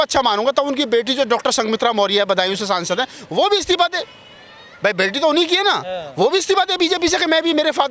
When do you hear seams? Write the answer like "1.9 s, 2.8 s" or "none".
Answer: none